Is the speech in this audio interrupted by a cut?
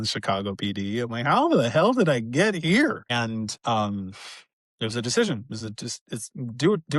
yes; 1 cut; at 3.1 s

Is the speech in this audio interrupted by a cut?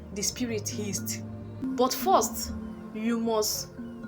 yes; 1 cut; at 1.6 s

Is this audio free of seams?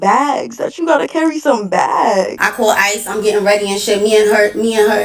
no; 1 cut; at 2.4 s

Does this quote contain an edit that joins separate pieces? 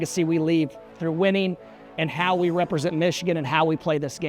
no; 0 cuts

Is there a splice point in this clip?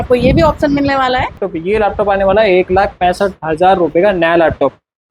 yes; 1 cut; at 1.3 s

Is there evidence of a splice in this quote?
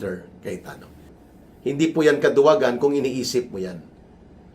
yes; 1 cut; at 1.1 s

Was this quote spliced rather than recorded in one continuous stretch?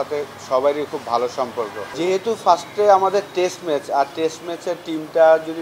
yes; 1 cut; at 1.8 s

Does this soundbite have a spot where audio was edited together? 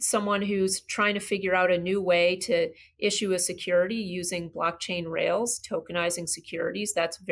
no; 0 cuts

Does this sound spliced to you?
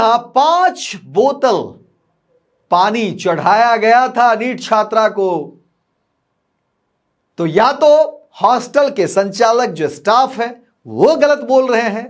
no; 0 cuts

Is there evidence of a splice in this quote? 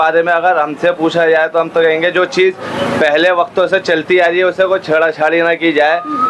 no; 0 cuts

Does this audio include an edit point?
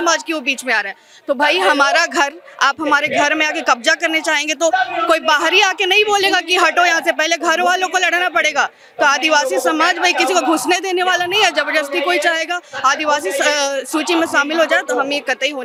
no; 0 cuts

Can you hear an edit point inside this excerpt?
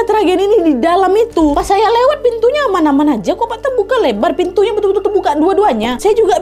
yes; 1 cut; at 1.5 s

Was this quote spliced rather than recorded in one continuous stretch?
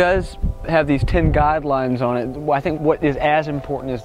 no; 0 cuts

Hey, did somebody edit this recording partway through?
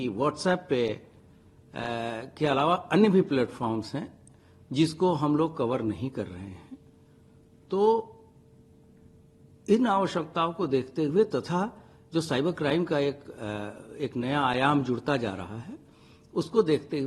no; 0 cuts

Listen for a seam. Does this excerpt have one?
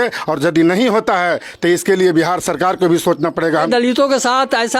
yes; 1 cut; at 3.7 s

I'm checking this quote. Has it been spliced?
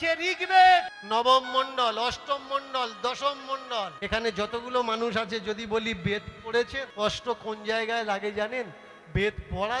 yes; 3 cuts; at 1.0 s, 4.0 s, 6.8 s

